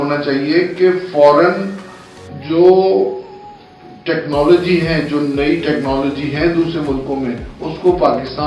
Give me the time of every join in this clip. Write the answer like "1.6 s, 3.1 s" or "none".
none